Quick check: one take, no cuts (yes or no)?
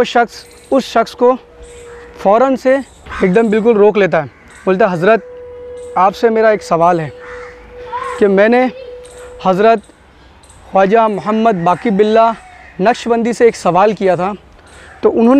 no